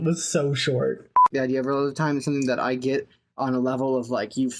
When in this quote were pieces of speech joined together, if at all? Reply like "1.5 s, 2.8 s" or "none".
1.3 s